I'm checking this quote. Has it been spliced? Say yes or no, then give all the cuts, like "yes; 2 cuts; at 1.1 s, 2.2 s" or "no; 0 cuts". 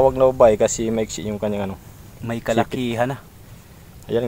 no; 0 cuts